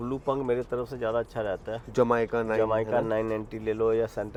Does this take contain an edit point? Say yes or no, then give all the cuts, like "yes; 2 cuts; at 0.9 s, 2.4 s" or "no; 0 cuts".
no; 0 cuts